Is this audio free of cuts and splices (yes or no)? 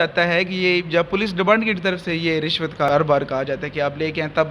no